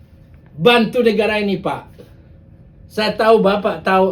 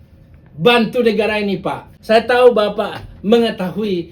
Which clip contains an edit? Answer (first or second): second